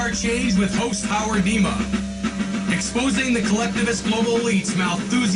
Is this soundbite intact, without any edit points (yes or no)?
yes